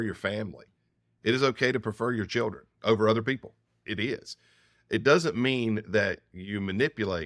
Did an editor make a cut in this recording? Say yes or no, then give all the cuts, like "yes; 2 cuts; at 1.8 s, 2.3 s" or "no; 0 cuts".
yes; 1 cut; at 3.8 s